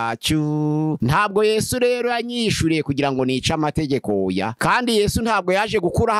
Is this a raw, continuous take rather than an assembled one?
no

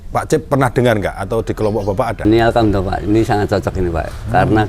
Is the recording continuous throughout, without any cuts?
no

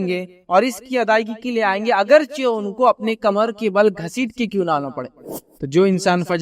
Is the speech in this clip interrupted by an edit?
yes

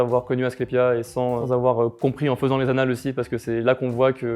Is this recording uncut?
no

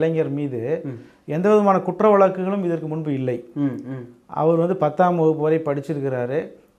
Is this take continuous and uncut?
yes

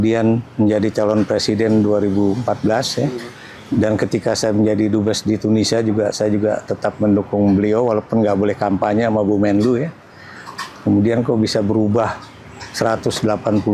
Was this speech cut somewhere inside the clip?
no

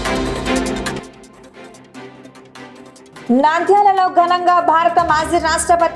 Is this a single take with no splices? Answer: yes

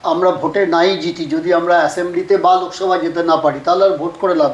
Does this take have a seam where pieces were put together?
no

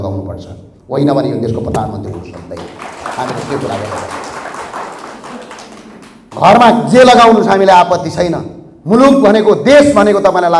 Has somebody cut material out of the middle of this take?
no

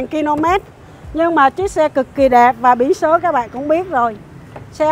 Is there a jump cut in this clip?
no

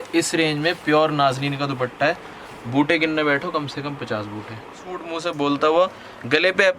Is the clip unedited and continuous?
no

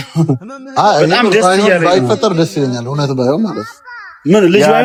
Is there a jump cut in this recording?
no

